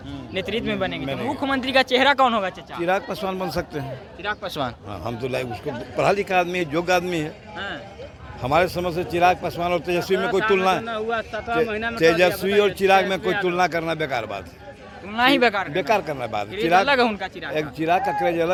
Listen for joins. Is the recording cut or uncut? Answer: uncut